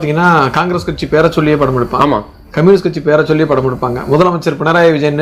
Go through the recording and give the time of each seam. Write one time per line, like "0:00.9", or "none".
none